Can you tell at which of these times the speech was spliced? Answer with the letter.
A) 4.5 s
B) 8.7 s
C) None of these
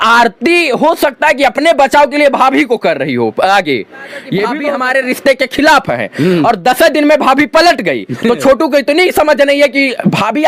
A